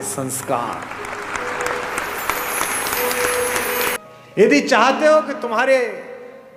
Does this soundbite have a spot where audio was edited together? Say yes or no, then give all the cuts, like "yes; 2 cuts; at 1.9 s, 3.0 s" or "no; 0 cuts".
yes; 1 cut; at 4.0 s